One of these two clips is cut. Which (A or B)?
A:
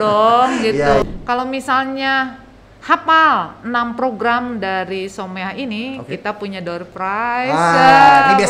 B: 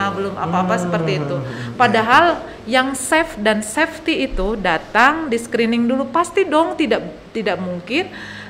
A